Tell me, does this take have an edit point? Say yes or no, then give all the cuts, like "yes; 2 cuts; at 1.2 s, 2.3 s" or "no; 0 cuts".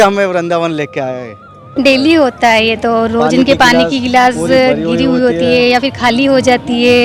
yes; 1 cut; at 1.7 s